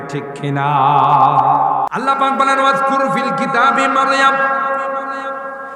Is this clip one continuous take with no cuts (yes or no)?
no